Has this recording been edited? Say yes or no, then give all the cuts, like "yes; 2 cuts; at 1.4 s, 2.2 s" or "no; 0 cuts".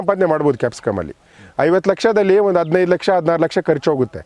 no; 0 cuts